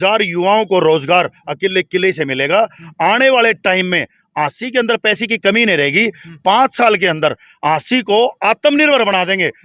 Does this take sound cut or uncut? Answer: uncut